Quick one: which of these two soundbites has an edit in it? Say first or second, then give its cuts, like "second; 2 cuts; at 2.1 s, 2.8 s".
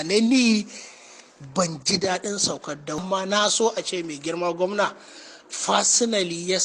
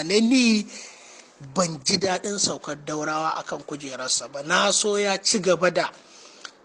first; 1 cut; at 3.0 s